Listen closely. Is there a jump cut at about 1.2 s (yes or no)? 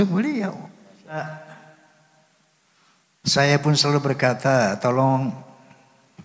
yes